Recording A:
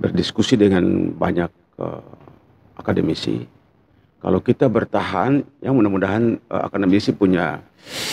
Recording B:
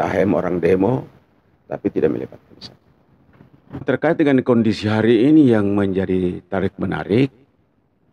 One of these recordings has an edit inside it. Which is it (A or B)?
B